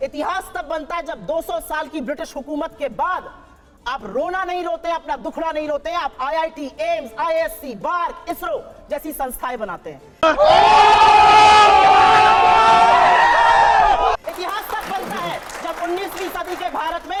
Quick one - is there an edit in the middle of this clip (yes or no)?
no